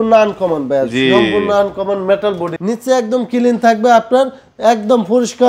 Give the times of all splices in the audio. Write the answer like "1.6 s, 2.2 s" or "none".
2.5 s